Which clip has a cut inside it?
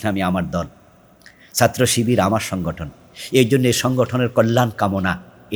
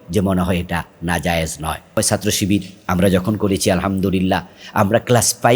second; 1 cut; at 2.0 s

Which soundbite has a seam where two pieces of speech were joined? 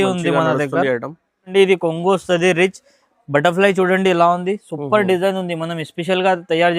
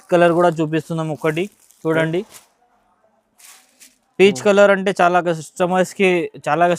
first; 1 cut; at 1.5 s

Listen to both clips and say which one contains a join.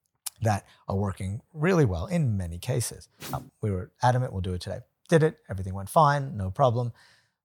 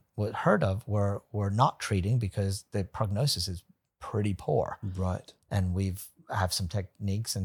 first; 1 cut; at 3.1 s

